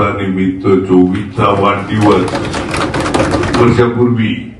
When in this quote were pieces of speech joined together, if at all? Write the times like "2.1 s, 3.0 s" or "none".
3.6 s